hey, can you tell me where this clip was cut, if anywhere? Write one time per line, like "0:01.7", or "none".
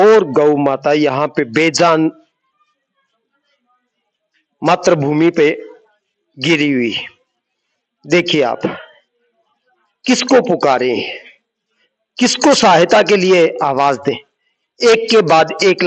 none